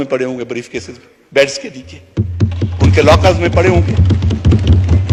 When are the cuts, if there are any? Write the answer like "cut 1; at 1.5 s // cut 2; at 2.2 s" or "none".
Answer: none